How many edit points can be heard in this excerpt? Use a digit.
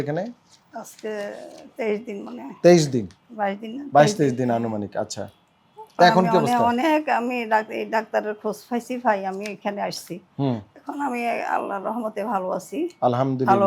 0